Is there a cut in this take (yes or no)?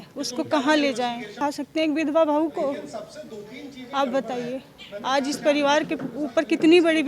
no